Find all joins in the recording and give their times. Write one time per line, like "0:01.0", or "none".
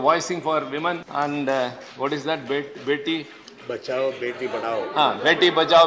0:01.0